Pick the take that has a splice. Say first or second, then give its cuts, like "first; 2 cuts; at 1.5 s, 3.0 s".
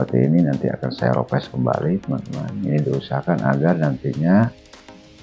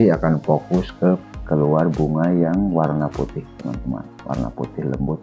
second; 1 cut; at 1.3 s